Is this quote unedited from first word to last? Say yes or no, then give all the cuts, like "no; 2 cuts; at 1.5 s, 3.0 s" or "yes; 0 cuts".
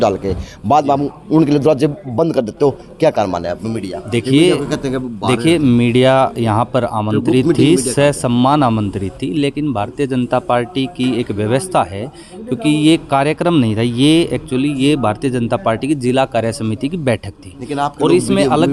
yes; 0 cuts